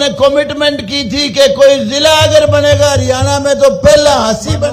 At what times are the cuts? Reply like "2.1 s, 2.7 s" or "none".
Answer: none